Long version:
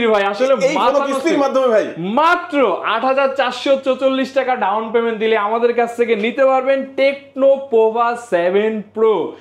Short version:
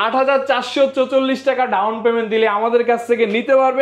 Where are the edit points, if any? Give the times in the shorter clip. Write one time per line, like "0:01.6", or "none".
none